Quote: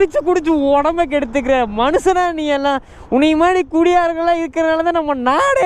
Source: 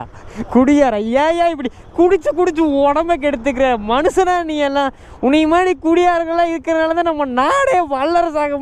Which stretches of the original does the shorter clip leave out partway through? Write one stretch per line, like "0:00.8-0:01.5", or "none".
none

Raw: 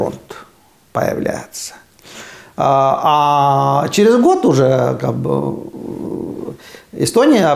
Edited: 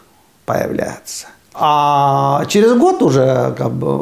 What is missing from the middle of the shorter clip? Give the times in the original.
0:02.0-0:03.0

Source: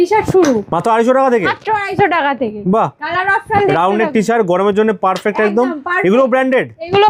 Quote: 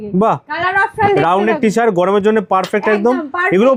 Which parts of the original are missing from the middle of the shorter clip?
none

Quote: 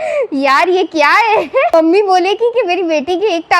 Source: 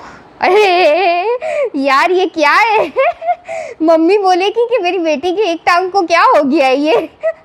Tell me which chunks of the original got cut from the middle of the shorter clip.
0:03.1-0:03.9

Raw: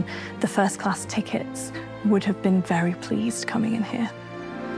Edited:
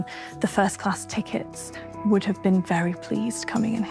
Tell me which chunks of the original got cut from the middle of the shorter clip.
none

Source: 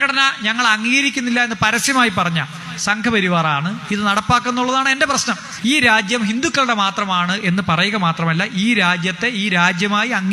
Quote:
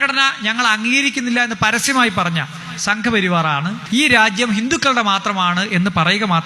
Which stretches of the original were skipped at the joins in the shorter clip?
0:03.8-0:05.5

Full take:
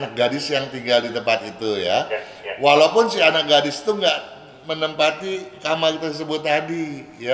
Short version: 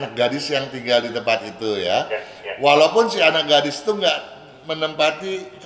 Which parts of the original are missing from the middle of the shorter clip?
none

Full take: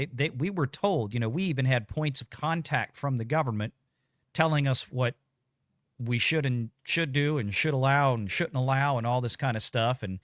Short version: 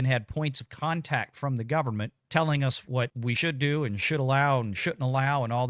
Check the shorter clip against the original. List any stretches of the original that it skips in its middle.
0:03.8-0:04.2
0:05.3-0:06.8

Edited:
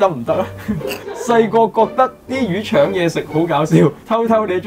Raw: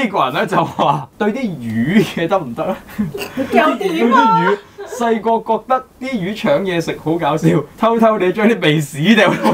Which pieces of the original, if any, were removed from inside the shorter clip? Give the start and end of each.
0:03.3-0:04.7

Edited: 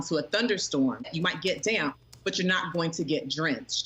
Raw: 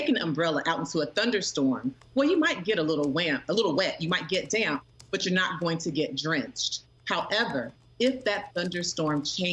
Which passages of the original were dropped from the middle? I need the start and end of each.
0:01.9-0:04.0

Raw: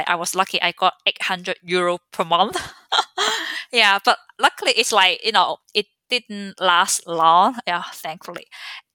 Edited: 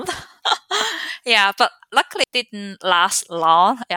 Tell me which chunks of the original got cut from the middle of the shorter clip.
0:04.7-0:06.0

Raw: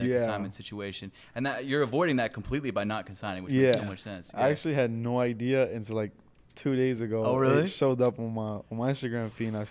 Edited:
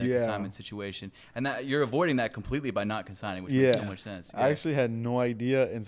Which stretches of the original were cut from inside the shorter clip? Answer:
none

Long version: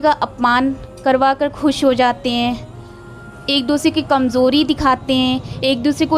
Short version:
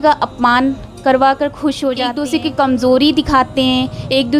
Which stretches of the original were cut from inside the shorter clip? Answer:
0:02.1-0:03.6

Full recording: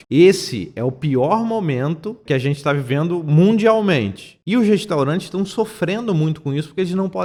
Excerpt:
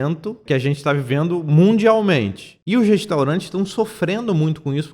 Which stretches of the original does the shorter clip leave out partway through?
none

